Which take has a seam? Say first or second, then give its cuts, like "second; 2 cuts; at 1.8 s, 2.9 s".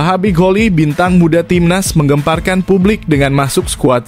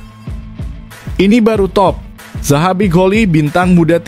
second; 1 cut; at 1.1 s